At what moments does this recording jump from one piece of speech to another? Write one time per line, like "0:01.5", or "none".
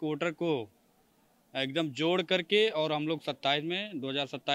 none